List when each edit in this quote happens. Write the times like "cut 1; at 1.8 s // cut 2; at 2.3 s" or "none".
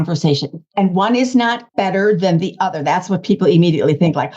cut 1; at 1.6 s